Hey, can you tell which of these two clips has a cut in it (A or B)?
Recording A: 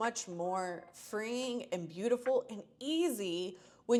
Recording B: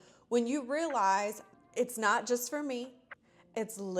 B